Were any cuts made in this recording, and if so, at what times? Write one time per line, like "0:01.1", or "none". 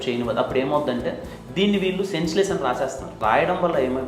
0:03.2